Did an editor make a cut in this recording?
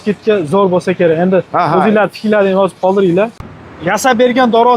yes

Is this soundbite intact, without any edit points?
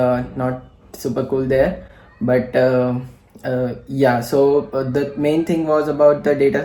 yes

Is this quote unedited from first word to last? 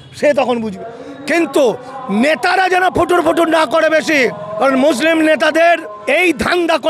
no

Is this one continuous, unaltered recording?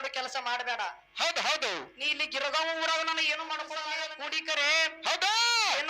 no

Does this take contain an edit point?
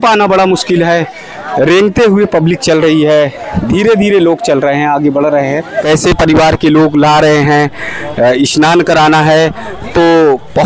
yes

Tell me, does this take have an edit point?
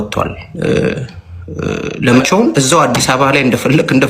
yes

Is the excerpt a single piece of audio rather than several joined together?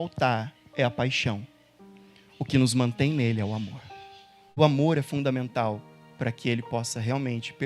no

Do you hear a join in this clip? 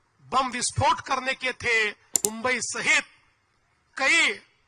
yes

